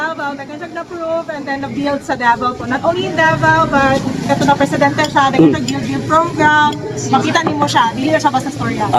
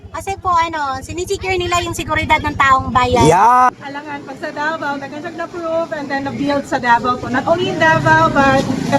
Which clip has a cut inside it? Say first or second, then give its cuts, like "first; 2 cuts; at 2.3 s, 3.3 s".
second; 1 cut; at 3.7 s